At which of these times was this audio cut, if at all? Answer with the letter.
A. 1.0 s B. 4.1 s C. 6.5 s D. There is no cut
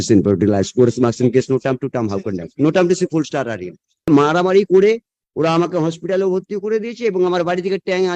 B